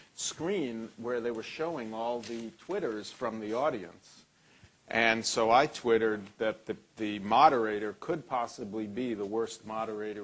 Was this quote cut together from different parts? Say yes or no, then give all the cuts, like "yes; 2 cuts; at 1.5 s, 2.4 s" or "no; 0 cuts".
yes; 1 cut; at 3.0 s